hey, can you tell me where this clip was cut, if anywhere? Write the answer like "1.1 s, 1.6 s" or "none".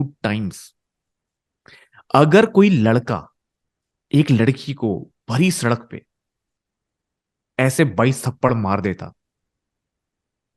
none